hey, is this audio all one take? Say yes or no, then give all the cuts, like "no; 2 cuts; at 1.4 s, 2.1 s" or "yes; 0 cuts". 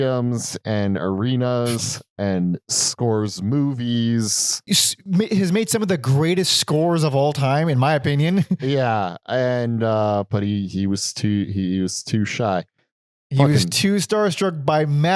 yes; 0 cuts